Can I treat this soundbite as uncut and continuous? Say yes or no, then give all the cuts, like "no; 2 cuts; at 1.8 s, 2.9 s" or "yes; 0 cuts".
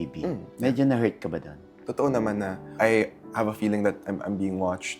no; 2 cuts; at 1.8 s, 2.7 s